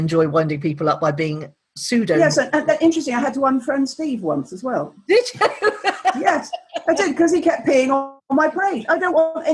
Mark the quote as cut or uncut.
uncut